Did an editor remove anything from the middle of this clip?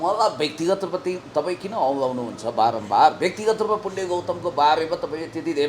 no; 0 cuts

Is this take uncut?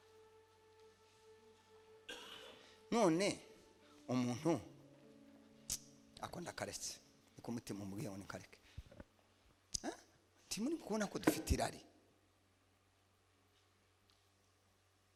yes; 0 cuts

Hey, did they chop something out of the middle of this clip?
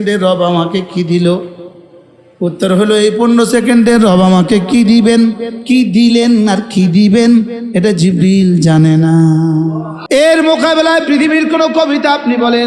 yes; 1 cut; at 9.9 s

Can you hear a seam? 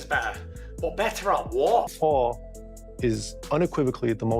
yes; 1 cut; at 1.9 s

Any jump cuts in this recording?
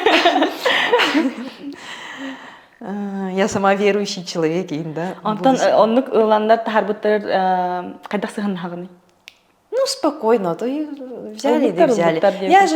no; 0 cuts

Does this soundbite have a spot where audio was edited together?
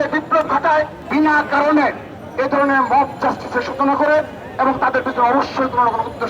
yes; 1 cut; at 1.0 s

